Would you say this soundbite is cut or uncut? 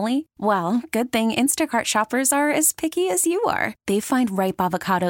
uncut